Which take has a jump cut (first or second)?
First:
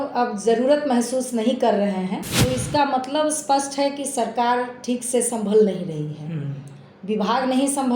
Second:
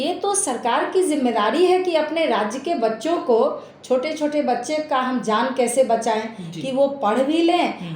first